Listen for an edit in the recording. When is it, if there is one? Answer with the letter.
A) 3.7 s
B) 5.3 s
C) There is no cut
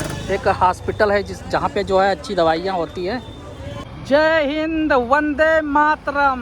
A